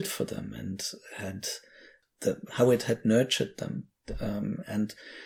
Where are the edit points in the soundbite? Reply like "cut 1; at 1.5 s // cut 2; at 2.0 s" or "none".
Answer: none